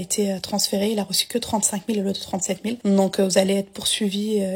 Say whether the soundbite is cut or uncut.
cut